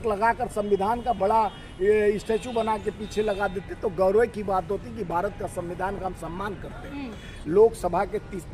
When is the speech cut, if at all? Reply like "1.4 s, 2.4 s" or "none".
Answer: none